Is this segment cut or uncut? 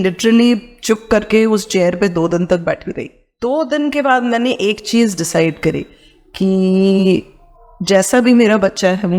cut